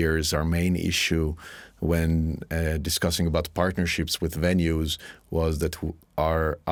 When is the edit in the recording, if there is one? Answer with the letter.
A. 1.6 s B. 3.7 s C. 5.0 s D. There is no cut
D